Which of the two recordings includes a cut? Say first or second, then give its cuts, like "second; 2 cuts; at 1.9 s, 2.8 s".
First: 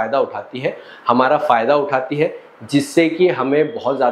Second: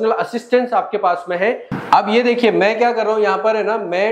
second; 1 cut; at 1.7 s